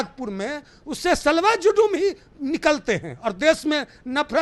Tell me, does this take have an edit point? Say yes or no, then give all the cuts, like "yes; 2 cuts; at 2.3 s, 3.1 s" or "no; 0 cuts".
no; 0 cuts